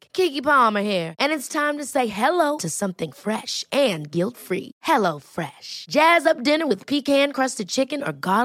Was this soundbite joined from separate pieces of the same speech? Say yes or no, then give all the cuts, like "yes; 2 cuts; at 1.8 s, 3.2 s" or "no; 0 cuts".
no; 0 cuts